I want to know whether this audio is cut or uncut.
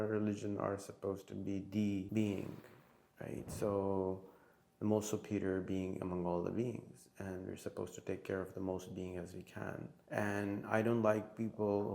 cut